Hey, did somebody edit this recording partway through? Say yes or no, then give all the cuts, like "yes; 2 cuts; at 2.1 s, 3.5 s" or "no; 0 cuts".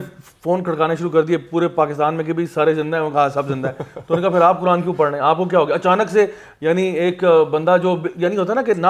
no; 0 cuts